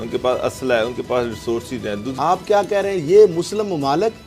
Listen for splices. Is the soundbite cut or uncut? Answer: cut